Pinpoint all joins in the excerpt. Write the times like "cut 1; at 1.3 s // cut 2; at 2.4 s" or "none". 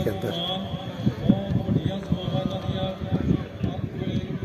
none

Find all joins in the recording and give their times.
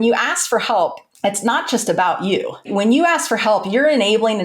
cut 1; at 1.1 s // cut 2; at 2.7 s

